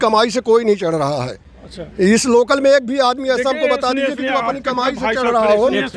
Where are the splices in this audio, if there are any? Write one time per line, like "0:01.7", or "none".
none